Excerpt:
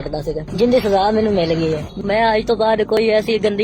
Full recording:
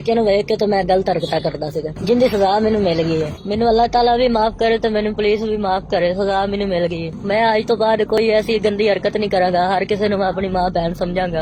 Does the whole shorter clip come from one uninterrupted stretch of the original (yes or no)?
no